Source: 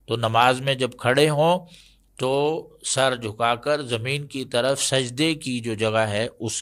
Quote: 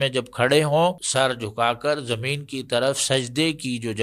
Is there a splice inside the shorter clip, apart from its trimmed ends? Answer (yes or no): yes